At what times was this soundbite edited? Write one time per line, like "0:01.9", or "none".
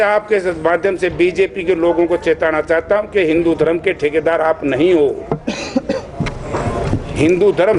none